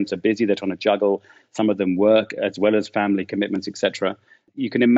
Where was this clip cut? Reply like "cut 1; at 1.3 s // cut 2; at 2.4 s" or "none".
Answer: none